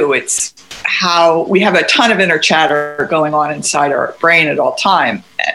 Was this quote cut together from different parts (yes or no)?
no